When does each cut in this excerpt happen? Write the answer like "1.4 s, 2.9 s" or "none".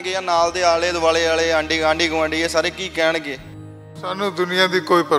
3.8 s